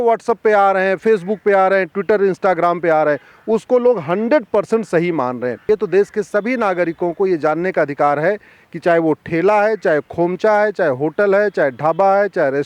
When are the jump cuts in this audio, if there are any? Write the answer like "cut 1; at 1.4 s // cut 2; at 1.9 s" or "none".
cut 1; at 5.6 s